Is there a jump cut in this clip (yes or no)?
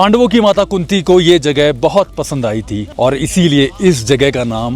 yes